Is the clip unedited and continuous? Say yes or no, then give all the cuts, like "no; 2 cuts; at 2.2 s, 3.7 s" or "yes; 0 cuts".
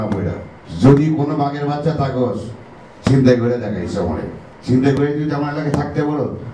yes; 0 cuts